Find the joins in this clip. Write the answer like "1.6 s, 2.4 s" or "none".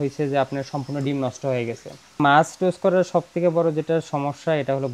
2.2 s